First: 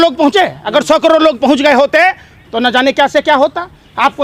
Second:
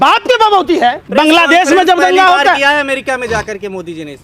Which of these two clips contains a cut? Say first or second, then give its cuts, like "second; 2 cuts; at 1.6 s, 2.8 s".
second; 1 cut; at 1.0 s